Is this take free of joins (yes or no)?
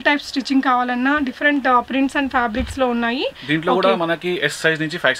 yes